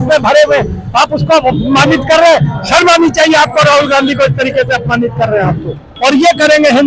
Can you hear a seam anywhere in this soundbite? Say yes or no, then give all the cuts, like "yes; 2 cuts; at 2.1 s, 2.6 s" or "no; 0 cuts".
yes; 1 cut; at 5.9 s